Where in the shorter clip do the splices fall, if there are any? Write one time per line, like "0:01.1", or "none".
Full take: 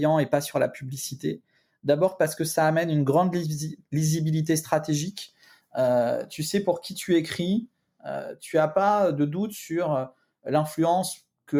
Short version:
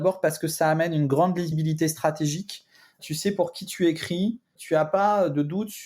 0:01.5
0:03.0
0:04.5